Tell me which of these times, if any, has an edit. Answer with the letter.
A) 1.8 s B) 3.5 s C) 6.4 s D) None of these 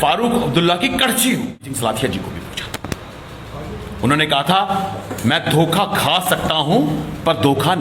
A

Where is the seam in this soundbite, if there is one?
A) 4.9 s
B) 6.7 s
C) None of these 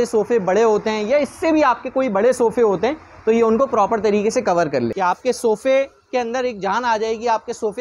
A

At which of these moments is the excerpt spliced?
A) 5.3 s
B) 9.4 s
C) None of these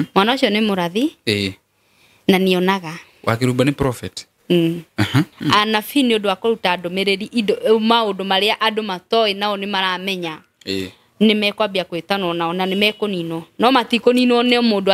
A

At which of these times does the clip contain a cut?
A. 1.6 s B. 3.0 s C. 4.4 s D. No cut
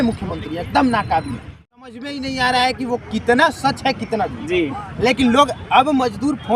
A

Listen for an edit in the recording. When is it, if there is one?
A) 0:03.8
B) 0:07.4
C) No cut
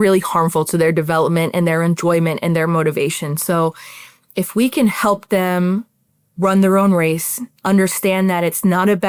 C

